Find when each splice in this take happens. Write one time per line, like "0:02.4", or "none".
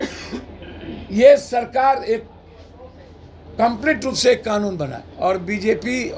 0:05.0